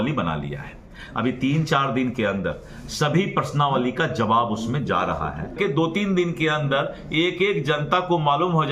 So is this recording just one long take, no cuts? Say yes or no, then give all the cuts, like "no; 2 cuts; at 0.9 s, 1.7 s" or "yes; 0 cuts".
no; 1 cut; at 5.5 s